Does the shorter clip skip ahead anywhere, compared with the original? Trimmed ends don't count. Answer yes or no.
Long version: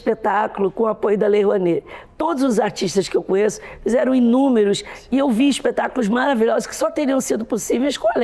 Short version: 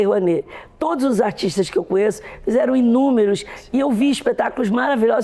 no